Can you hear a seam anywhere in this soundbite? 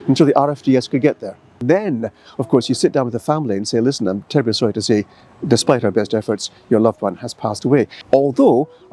yes; 2 cuts; at 1.6 s, 8.0 s

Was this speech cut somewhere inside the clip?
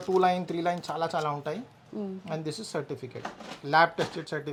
no; 0 cuts

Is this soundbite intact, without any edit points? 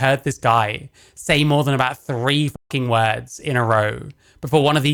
yes; 0 cuts

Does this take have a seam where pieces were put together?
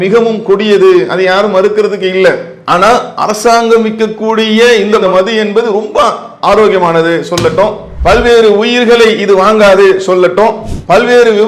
no; 0 cuts

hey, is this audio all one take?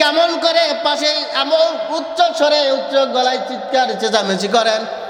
yes; 0 cuts

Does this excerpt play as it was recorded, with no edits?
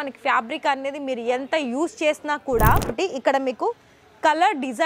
no; 1 cut; at 2.9 s

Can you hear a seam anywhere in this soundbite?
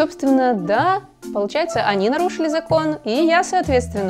no; 0 cuts

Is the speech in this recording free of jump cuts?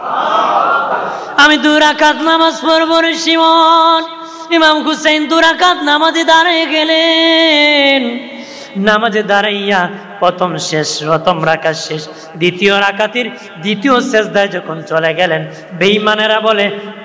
no; 1 cut; at 0.9 s

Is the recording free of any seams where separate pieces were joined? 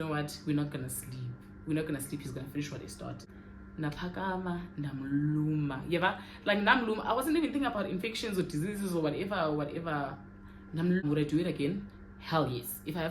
no; 2 cuts; at 3.3 s, 11.0 s

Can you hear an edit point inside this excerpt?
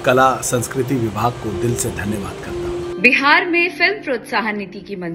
yes; 1 cut; at 2.4 s

